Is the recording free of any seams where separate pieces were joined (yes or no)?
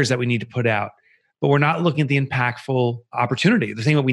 no